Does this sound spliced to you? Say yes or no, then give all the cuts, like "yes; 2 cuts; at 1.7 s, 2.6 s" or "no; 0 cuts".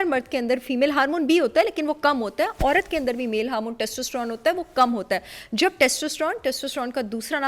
no; 0 cuts